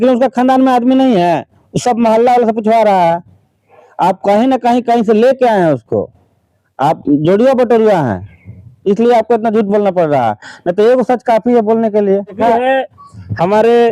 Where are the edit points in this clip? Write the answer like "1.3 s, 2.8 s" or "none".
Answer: 12.4 s